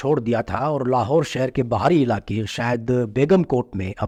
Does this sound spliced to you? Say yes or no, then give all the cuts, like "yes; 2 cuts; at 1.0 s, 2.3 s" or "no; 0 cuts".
no; 0 cuts